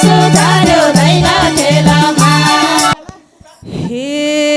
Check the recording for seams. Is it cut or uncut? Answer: cut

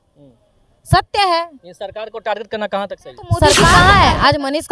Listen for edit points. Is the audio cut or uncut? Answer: cut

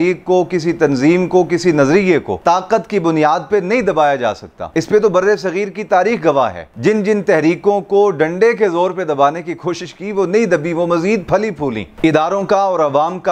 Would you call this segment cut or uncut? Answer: cut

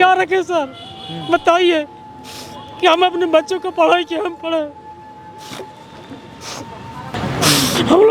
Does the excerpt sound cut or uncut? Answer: cut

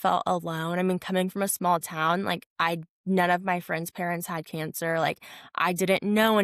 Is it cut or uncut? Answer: uncut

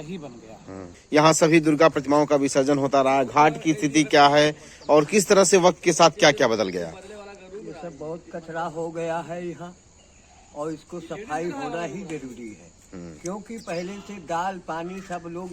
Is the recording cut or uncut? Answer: cut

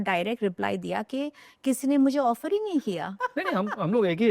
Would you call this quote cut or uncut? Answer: cut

